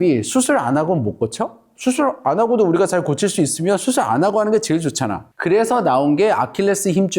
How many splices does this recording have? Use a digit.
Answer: 1